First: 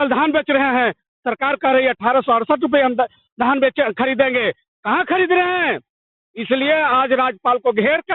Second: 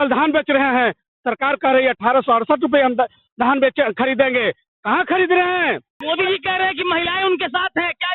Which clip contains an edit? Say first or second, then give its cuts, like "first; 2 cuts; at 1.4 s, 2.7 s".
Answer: second; 1 cut; at 6.0 s